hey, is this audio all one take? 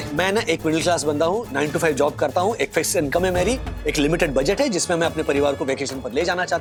yes; 0 cuts

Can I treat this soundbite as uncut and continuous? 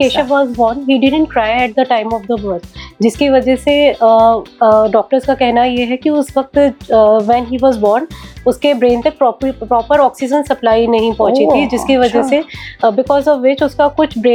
yes; 0 cuts

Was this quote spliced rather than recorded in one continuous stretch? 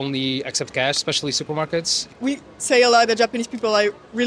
yes; 1 cut; at 2.1 s

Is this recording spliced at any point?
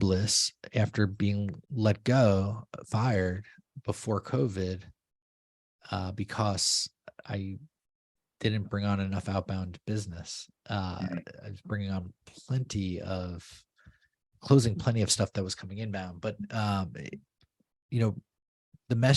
yes; 1 cut; at 1.6 s

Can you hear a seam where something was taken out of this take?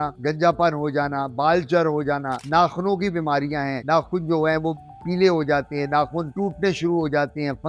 no; 0 cuts

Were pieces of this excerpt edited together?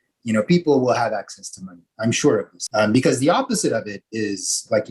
yes; 1 cut; at 2.6 s

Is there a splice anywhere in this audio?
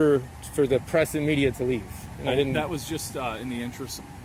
no; 0 cuts

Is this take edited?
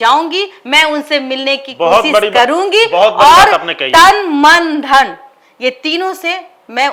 no; 0 cuts

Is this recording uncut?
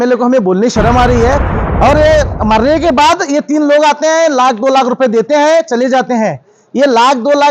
no; 1 cut; at 1.6 s

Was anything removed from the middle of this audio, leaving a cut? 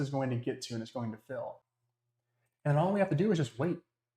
yes; 1 cut; at 1.7 s

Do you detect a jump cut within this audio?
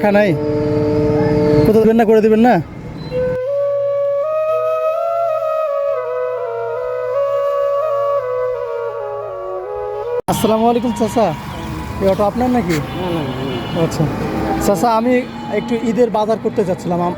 no; 0 cuts

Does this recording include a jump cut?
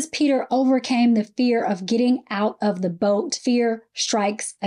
yes; 1 cut; at 3.3 s

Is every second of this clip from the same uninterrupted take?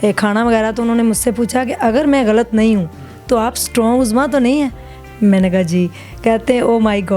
yes; 0 cuts

